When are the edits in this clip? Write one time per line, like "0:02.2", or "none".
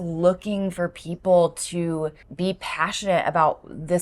0:02.2

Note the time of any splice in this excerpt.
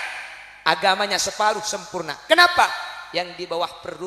none

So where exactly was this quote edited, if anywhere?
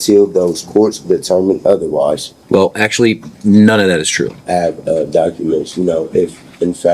0:02.3
0:04.4

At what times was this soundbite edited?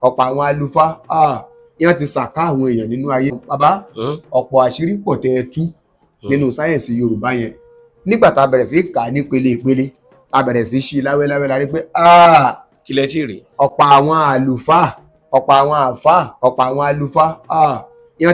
0:03.4

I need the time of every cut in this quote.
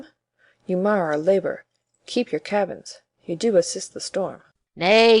0:02.4

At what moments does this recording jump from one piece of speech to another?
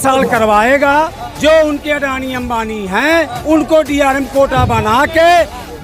0:01.2
0:03.4

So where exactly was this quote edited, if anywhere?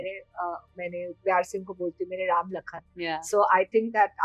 none

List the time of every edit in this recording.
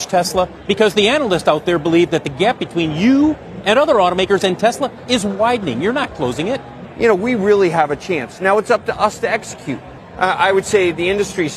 0:06.8
0:10.0

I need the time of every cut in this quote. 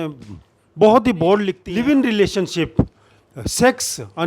0:01.6

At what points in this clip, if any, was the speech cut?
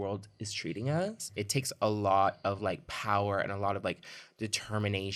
none

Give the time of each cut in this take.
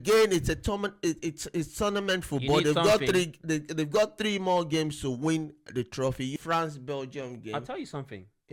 0:06.3

